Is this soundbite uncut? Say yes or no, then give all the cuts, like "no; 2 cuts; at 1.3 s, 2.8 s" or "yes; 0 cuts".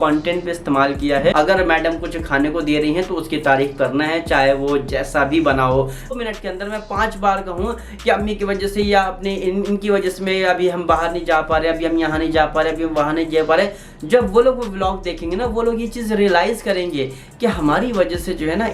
no; 2 cuts; at 1.3 s, 6.1 s